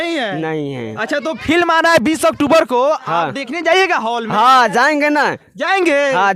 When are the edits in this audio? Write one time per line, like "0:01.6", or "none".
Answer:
none